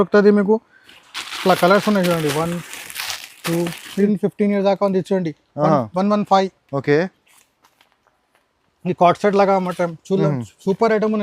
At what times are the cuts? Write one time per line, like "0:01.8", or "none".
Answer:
0:04.1

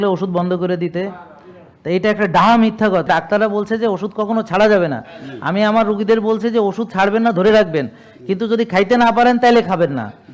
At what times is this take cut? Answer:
0:03.0

